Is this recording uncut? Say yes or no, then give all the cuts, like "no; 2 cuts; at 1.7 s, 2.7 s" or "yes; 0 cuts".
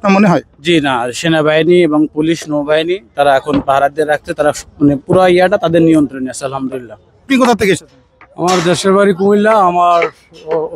no; 1 cut; at 7.3 s